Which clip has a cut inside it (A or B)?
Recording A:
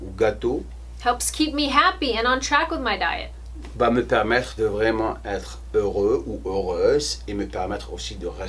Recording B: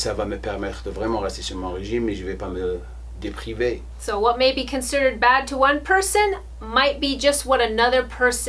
B